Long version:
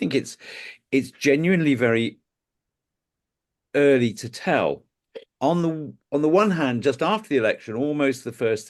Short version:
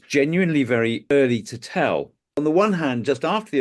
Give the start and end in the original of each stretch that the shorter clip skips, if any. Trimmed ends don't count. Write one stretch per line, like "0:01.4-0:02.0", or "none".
0:02.2-0:03.8
0:04.9-0:06.0